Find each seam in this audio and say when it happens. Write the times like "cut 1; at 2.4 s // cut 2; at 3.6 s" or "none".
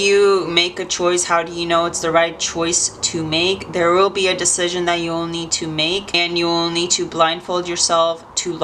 none